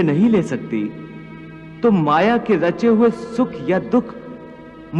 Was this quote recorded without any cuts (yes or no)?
yes